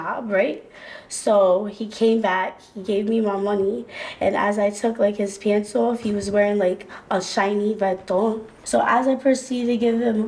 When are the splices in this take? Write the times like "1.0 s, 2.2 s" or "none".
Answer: 8.5 s